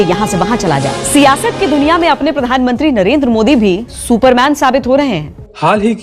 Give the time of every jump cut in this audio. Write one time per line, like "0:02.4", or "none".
none